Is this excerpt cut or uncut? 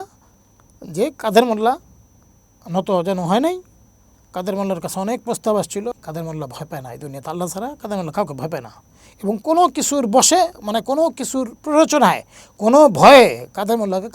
cut